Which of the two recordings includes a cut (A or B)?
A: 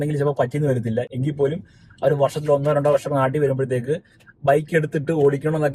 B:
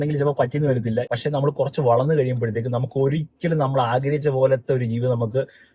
B